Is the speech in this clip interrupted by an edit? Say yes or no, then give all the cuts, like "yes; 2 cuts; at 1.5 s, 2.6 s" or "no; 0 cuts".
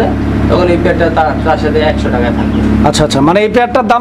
no; 0 cuts